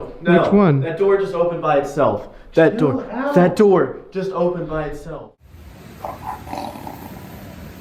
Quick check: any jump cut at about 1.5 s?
no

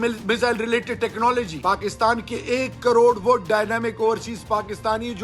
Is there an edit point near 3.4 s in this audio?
no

